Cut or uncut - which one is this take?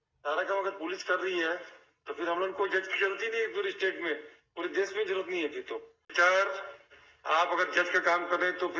cut